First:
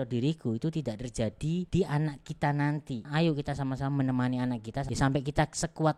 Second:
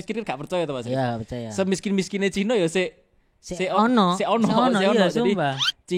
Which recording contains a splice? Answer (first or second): first